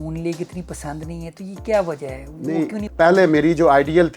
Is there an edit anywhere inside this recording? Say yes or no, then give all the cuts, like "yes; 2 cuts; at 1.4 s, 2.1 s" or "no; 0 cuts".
yes; 1 cut; at 2.8 s